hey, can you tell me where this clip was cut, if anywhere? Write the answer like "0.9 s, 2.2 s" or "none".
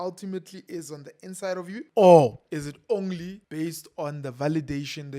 1.9 s, 2.4 s, 3.4 s